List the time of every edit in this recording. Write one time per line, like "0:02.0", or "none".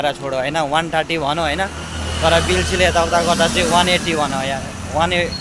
none